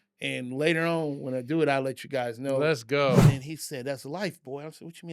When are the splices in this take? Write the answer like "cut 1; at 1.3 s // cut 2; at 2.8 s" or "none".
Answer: cut 1; at 3.3 s